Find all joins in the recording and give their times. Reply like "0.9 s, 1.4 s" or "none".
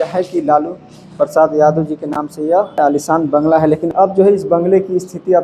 2.8 s, 3.9 s